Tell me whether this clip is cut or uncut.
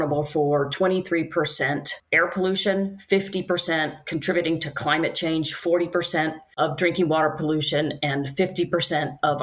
uncut